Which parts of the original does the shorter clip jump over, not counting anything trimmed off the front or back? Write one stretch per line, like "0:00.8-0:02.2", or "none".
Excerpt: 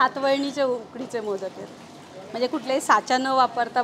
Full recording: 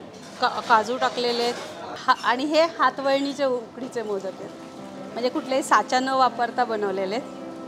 none